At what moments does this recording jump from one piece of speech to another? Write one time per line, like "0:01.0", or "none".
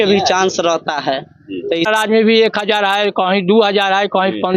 0:01.9